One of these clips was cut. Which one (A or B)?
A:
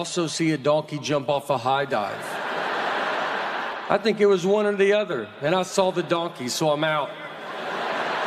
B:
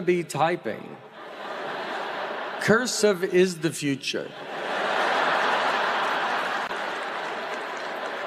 A